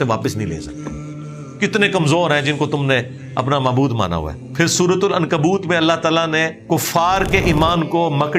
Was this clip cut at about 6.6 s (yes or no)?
yes